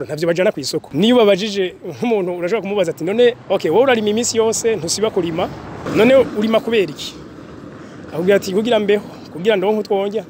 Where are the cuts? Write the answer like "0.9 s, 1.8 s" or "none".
0.9 s, 3.4 s, 5.8 s